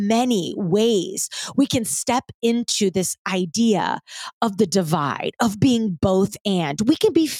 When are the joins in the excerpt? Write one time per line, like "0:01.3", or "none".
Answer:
none